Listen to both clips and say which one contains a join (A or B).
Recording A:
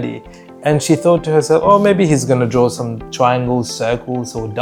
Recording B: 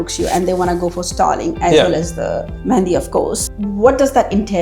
B